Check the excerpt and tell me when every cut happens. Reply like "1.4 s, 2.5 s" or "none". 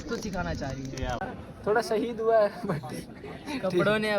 1.3 s